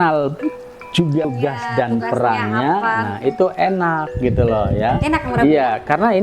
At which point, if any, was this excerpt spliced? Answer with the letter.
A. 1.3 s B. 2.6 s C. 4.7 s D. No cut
A